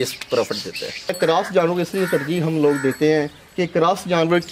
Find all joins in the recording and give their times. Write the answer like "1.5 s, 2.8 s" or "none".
1.1 s